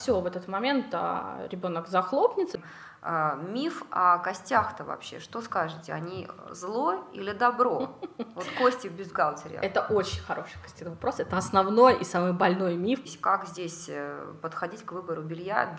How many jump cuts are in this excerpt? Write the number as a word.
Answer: two